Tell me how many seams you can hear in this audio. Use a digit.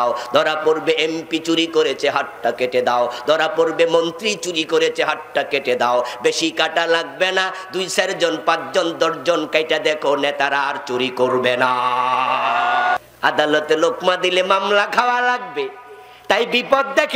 1